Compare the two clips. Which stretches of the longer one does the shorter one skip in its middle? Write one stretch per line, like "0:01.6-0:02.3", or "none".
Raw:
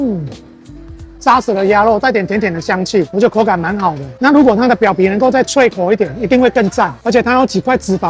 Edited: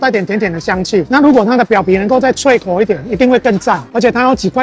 0:03.1-0:04.2